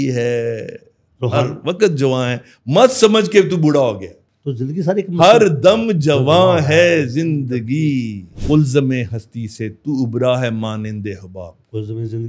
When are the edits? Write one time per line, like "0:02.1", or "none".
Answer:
0:08.3